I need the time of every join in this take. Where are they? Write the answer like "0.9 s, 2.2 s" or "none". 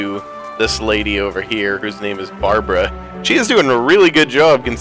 none